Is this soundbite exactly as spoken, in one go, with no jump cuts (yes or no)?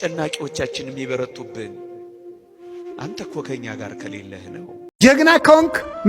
no